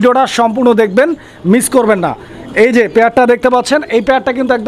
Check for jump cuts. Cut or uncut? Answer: uncut